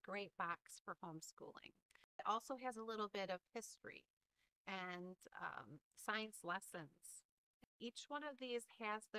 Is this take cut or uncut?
cut